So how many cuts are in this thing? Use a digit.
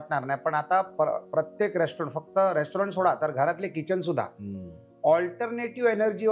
0